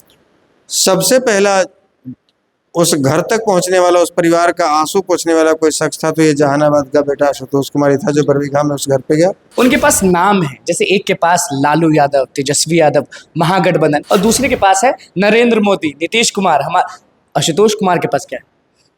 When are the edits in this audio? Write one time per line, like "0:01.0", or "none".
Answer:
0:09.4
0:14.0